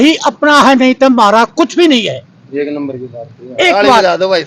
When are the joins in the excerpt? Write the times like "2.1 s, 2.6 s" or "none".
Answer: none